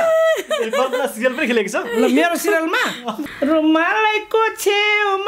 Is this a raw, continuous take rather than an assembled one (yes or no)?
no